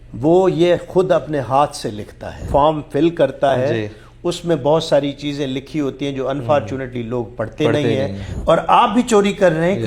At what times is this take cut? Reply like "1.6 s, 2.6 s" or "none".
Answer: 2.5 s, 8.3 s

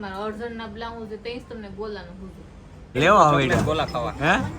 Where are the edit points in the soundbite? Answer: 3.0 s

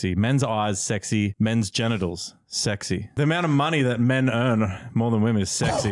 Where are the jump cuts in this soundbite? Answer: 1.3 s, 3.1 s

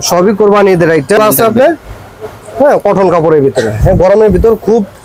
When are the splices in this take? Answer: 1.2 s

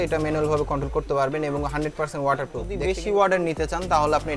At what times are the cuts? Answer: 2.7 s

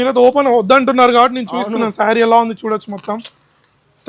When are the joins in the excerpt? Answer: none

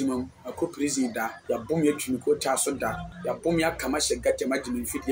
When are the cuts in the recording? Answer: 1.4 s, 3.1 s

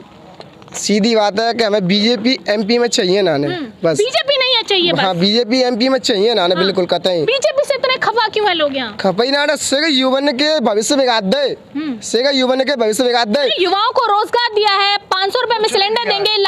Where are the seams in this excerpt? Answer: none

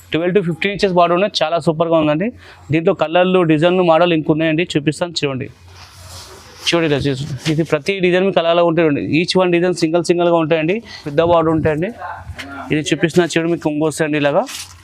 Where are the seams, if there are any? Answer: 11.0 s

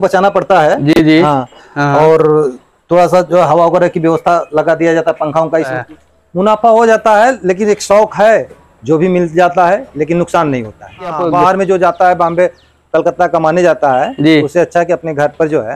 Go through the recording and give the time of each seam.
5.8 s, 11.2 s

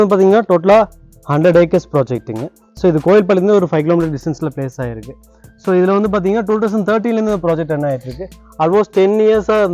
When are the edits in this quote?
none

